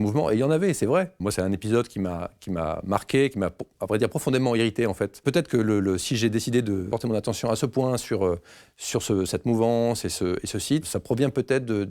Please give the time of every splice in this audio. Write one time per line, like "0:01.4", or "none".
0:01.2
0:05.2
0:06.9
0:10.9